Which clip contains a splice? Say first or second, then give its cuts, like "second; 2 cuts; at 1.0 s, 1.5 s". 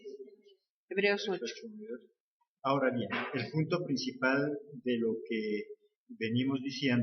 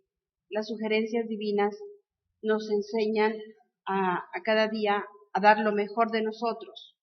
second; 1 cut; at 2.1 s